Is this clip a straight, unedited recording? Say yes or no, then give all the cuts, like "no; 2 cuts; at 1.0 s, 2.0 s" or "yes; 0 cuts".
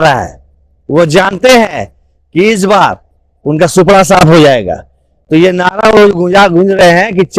yes; 0 cuts